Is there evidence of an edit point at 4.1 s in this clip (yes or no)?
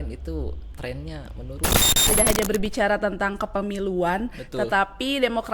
no